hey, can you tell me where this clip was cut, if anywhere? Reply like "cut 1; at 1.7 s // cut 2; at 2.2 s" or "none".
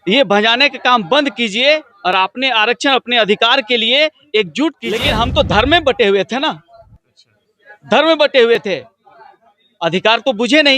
cut 1; at 4.9 s